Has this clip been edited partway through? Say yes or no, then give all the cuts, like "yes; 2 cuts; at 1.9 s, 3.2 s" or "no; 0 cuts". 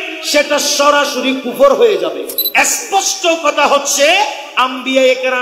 yes; 1 cut; at 2.4 s